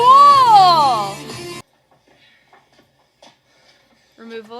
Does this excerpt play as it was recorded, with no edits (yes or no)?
no